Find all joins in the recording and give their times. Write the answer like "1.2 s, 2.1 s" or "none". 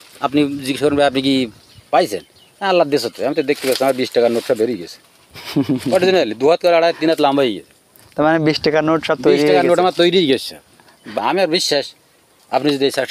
11.0 s